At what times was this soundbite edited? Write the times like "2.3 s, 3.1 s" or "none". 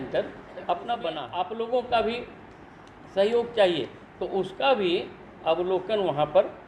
1.2 s

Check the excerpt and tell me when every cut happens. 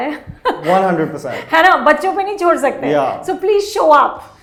none

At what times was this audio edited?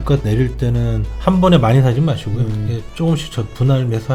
none

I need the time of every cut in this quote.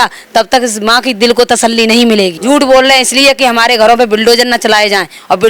2.4 s

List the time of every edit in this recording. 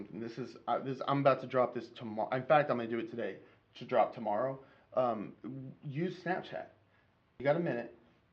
7.4 s

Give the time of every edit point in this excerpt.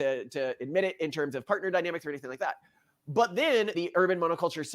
3.7 s

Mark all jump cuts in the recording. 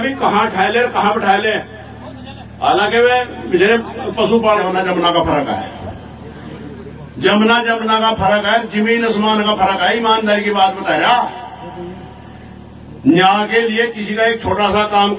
4.6 s

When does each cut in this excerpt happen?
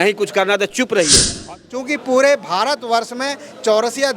1.4 s

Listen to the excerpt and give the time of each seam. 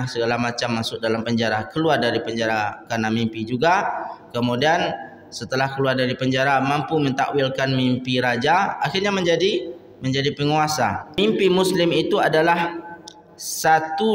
11.2 s

